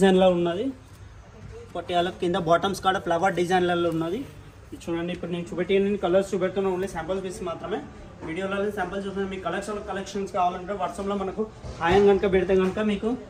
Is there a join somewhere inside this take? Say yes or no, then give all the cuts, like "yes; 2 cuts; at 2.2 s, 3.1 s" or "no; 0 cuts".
no; 0 cuts